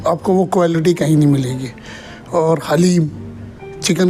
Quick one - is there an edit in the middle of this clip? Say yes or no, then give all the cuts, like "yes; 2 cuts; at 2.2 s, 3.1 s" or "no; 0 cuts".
no; 0 cuts